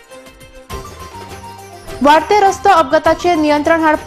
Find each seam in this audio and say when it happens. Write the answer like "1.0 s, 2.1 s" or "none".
1.5 s